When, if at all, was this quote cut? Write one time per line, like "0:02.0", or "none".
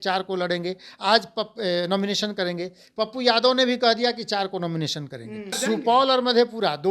0:05.6